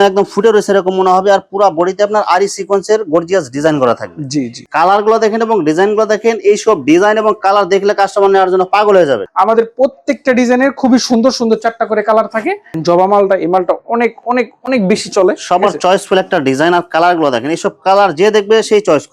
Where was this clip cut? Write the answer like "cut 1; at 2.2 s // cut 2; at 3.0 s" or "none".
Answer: cut 1; at 4.6 s // cut 2; at 9.2 s // cut 3; at 12.7 s